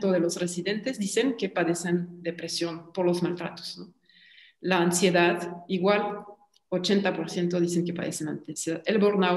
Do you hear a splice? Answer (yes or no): no